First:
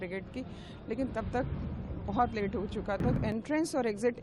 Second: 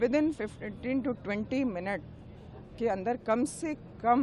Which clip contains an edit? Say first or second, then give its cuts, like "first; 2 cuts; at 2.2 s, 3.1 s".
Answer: first; 1 cut; at 3.2 s